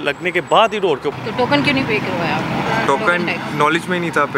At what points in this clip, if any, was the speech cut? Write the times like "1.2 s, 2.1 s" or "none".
1.1 s